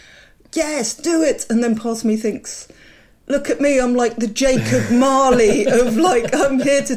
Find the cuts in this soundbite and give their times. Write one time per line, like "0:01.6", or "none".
none